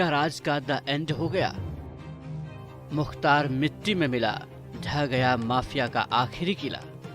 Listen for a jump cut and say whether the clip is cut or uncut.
cut